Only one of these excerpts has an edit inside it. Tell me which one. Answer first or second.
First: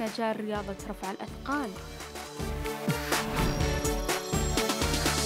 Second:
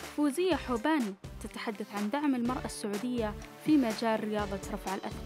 first